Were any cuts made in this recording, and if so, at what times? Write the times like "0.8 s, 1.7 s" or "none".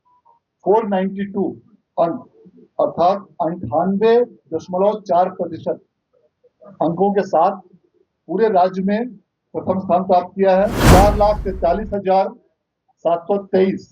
10.8 s

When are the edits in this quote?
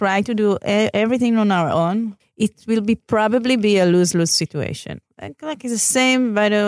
2.2 s, 5.0 s

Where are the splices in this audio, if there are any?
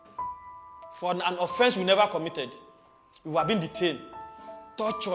1.0 s

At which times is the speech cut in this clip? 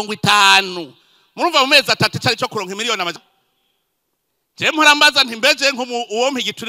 3.2 s

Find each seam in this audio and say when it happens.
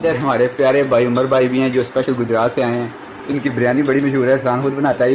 none

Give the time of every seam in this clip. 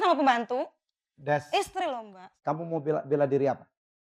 2.2 s

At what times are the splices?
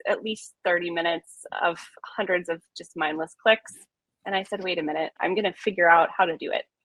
5.1 s

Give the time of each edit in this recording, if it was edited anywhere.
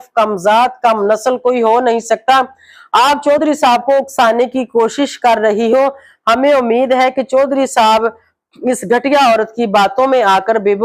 none

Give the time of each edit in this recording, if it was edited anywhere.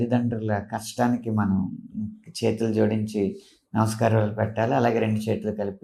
none

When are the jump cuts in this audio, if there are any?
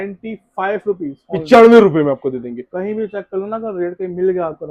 none

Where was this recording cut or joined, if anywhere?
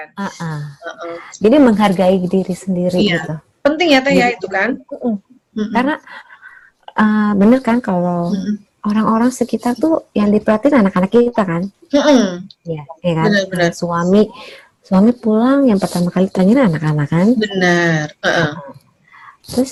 none

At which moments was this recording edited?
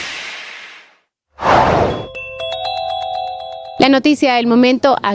3.7 s

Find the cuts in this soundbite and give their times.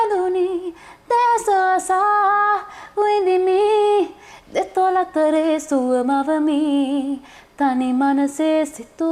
none

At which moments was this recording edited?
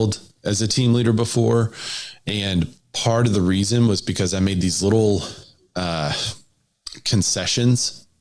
none

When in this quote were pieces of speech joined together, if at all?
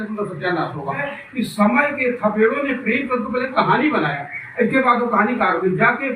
1.1 s

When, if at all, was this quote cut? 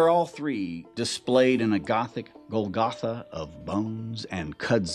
none

